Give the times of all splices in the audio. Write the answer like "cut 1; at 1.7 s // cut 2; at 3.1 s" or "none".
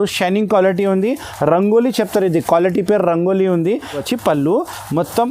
cut 1; at 4.0 s